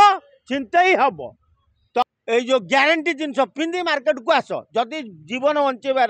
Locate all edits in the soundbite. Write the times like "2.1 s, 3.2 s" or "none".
2.1 s